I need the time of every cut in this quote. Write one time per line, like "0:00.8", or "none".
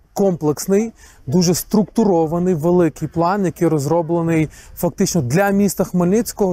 none